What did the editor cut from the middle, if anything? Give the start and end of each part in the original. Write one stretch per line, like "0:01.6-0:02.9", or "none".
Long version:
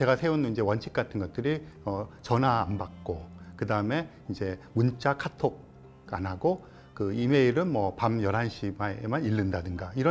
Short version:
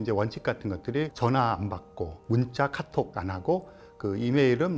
0:01.6-0:02.2
0:03.3-0:04.6
0:05.6-0:06.1